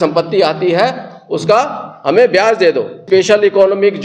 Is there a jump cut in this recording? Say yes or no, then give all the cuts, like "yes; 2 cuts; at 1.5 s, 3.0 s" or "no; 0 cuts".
yes; 1 cut; at 3.0 s